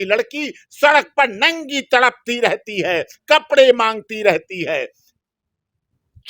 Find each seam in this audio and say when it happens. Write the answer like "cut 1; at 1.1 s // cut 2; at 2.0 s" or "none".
none